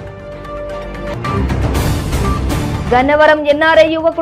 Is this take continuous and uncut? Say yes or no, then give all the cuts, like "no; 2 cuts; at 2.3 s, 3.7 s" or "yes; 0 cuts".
no; 1 cut; at 0.9 s